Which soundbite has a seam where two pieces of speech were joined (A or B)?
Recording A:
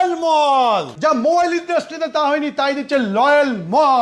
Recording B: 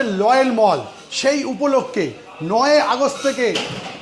A